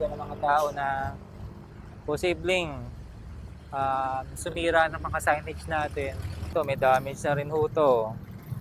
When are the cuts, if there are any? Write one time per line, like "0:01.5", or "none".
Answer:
0:06.5

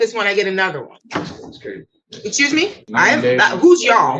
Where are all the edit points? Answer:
0:00.9
0:02.9

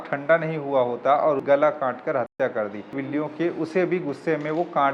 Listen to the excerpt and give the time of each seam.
0:01.4
0:03.0

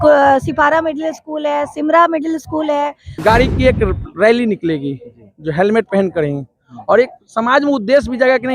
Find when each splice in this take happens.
0:03.2

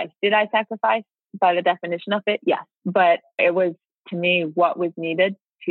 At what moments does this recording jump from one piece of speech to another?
0:02.7
0:03.4

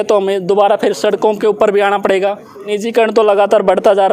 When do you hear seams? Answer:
0:02.7

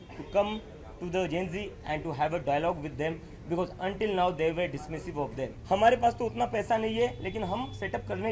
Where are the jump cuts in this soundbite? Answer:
0:05.5

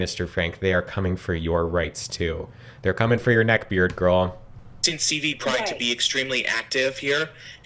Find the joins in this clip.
none

